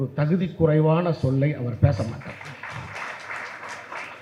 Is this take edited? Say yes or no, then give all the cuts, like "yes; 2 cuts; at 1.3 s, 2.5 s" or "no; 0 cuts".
no; 0 cuts